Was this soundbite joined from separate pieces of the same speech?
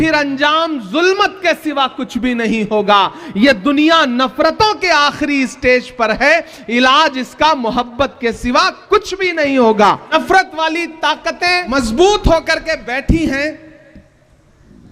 yes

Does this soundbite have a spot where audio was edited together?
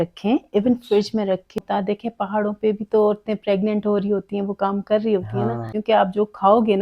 yes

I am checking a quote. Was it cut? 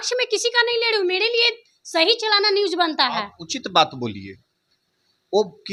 no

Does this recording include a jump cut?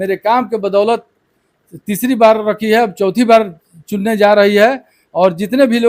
no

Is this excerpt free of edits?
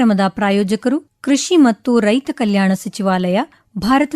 no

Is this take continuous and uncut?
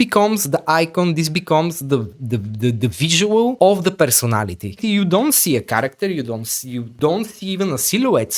no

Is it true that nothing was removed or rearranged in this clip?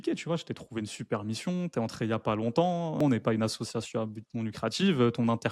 no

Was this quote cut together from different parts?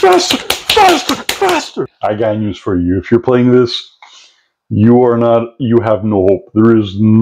yes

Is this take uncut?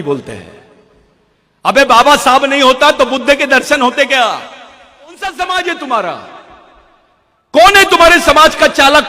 no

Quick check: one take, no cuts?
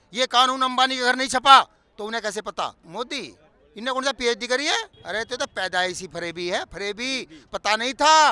no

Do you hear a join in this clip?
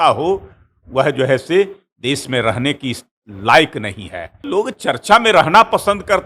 yes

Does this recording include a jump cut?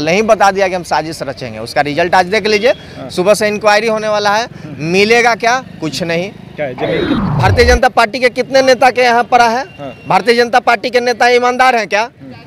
yes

